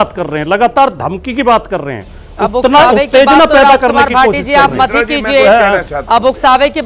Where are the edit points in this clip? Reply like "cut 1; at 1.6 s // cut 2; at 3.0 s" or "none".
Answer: none